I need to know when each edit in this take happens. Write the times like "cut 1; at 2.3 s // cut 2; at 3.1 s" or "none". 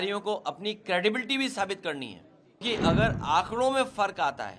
cut 1; at 2.6 s